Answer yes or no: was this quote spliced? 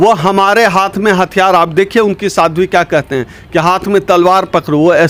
no